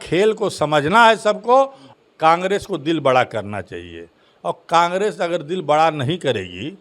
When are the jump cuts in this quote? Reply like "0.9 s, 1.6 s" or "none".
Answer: 1.8 s